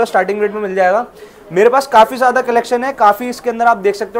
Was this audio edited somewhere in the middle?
no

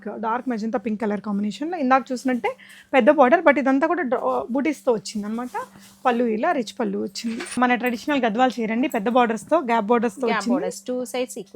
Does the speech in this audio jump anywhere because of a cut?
yes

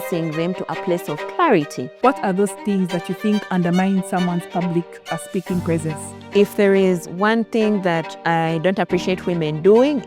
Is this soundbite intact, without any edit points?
no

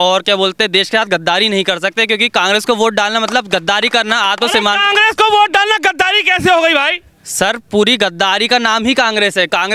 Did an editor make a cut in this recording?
no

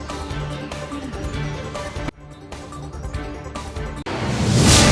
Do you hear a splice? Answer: no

